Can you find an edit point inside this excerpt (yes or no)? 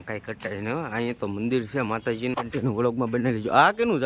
yes